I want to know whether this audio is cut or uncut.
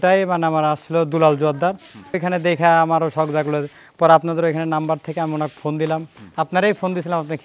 cut